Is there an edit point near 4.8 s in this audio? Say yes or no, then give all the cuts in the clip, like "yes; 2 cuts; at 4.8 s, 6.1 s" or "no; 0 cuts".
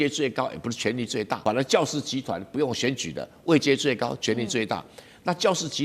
no; 1 cut; at 1.4 s